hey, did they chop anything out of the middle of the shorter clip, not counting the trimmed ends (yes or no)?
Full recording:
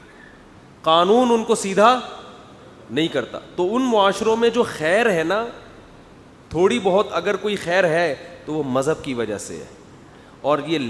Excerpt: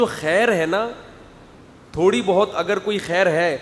no